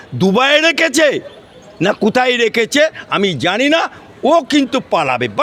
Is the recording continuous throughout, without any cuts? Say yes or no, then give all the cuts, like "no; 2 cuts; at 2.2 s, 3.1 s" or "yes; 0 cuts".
yes; 0 cuts